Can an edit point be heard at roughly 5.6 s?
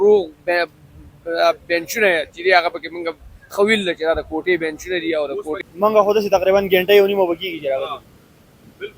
yes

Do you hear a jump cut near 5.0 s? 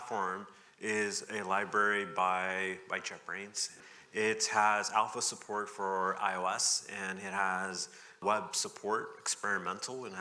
no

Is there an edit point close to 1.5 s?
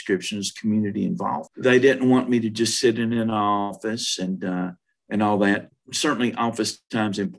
yes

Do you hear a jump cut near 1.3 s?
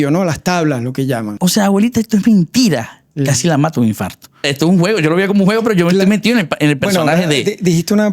yes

